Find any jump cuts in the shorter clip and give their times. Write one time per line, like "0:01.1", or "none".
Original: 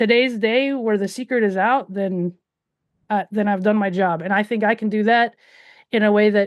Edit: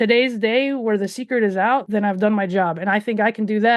0:01.9